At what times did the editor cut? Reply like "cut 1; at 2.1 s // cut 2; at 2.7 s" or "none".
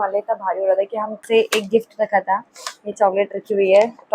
cut 1; at 1.2 s